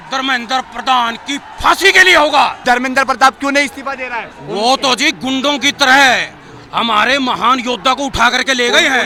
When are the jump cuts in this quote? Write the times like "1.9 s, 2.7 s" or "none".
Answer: none